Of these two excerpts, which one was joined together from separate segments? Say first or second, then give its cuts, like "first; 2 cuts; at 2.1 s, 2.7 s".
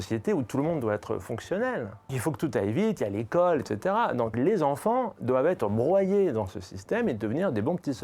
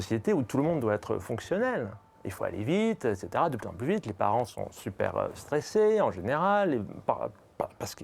first; 2 cuts; at 2.2 s, 4.3 s